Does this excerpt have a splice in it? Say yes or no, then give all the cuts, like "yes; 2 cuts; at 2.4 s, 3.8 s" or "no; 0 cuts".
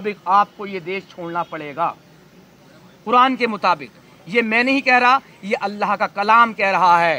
no; 0 cuts